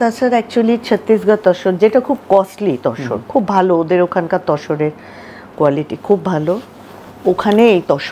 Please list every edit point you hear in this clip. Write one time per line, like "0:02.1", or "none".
none